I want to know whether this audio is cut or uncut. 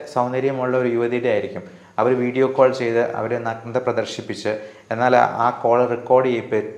uncut